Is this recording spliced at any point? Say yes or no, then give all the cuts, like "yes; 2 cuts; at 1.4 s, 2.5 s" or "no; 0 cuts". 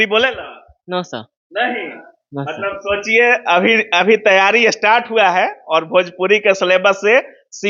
no; 0 cuts